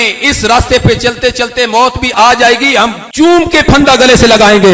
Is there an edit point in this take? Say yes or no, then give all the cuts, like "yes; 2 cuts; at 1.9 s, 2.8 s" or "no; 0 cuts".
no; 0 cuts